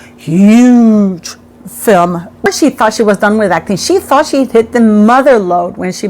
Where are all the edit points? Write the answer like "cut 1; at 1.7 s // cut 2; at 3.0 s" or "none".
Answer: cut 1; at 2.5 s